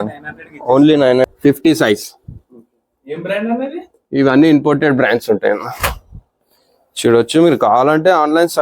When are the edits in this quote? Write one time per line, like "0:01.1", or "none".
0:01.2